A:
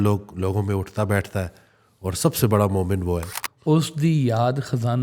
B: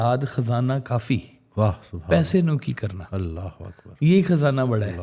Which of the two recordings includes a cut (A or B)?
A